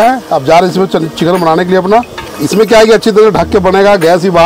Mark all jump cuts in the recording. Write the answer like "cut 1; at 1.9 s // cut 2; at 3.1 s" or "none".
cut 1; at 2.2 s